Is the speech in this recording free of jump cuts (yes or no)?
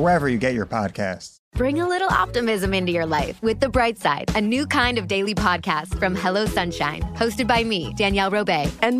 no